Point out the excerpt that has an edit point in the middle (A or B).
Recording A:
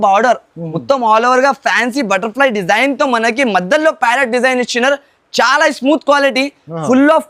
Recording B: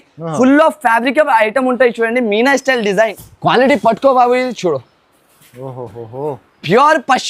B